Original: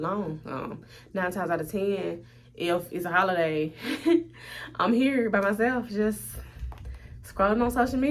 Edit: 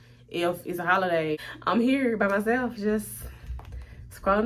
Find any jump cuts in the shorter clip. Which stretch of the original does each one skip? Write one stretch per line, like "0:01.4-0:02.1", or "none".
0:03.7-0:04.6

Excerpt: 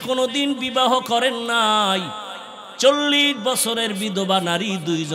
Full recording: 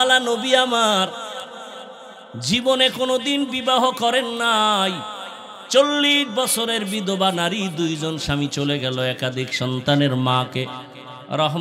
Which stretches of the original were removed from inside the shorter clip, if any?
none

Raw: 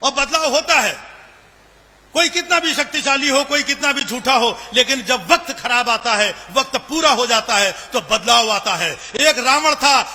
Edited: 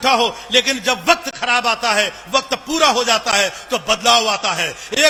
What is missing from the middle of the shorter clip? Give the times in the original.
none

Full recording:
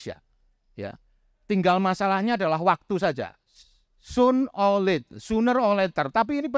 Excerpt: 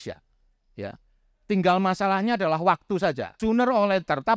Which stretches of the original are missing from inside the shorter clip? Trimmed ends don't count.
0:03.3-0:05.2

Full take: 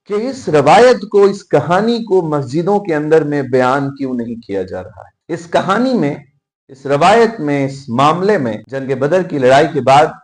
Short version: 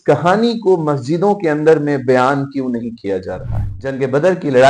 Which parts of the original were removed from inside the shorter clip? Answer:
0:05.2-0:08.6

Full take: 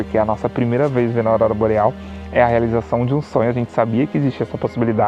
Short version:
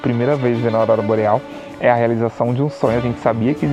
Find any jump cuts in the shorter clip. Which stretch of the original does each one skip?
none

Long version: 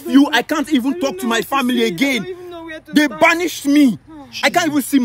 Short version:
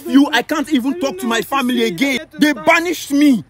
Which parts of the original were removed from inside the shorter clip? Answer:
0:02.2-0:02.8

